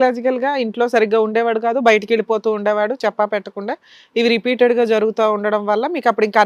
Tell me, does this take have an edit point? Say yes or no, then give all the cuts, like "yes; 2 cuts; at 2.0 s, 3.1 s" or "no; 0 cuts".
no; 0 cuts